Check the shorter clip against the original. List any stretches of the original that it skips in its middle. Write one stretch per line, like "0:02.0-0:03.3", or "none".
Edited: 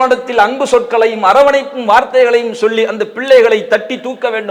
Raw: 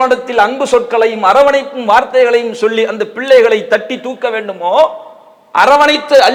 none

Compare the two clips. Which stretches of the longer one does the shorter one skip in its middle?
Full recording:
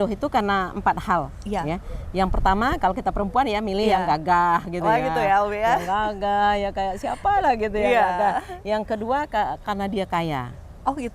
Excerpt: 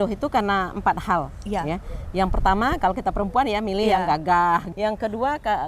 0:04.7-0:08.6

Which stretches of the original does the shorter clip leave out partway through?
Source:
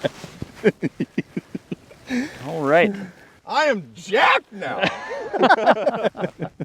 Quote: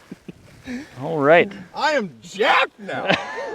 0:03.1-0:03.4

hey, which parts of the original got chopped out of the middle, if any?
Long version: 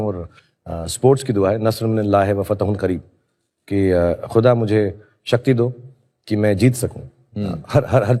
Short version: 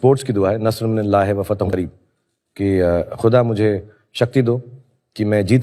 0:02.7-0:02.8

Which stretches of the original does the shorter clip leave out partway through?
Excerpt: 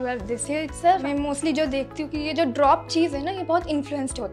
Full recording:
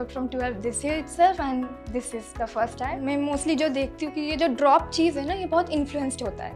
0:01.4-0:03.1

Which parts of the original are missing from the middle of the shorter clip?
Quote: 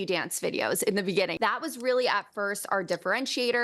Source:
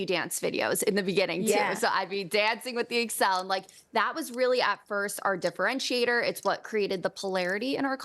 0:01.3-0:03.9

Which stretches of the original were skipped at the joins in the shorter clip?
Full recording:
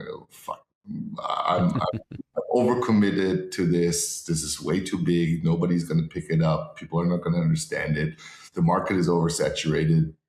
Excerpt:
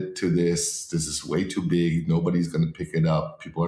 none

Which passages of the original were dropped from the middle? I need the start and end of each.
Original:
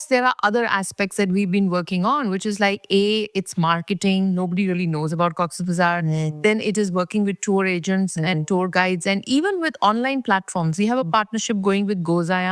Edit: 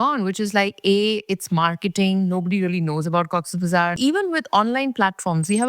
0:06.0-0:09.2

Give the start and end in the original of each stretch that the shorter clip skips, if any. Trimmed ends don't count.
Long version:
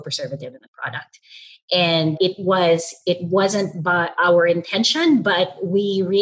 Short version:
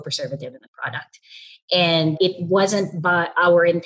0:02.4-0:03.2

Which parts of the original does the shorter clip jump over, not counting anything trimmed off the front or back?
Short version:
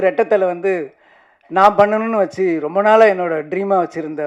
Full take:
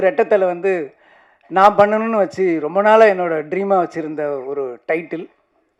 none

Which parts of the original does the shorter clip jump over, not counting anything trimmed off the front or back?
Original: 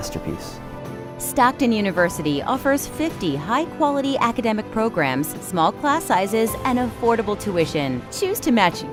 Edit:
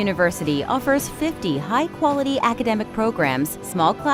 none

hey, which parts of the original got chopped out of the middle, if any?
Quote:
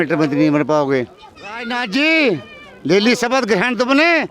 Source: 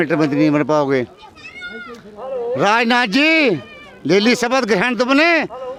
0:01.7-0:02.9

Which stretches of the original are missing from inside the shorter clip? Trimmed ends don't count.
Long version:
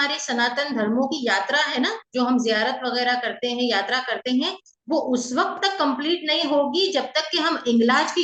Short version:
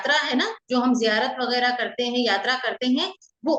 none

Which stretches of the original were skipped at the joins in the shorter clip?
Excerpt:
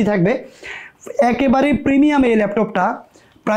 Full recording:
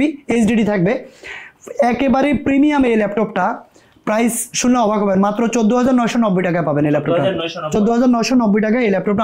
none

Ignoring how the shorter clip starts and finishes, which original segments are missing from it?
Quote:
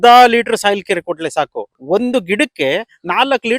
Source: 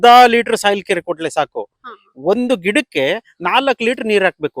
0:01.7-0:02.0

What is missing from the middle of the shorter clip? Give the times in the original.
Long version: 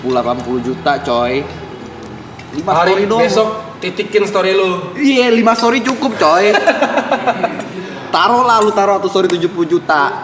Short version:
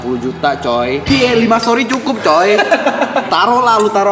0:01.5-0:05.0
0:07.2-0:08.1

